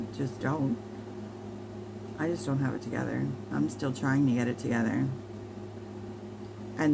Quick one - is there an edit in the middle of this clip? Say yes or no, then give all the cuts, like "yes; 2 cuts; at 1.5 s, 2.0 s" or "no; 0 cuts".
no; 0 cuts